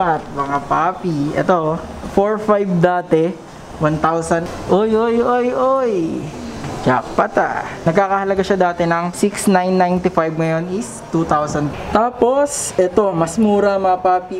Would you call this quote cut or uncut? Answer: cut